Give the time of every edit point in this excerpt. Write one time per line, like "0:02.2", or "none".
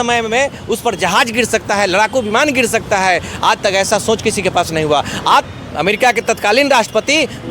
0:05.5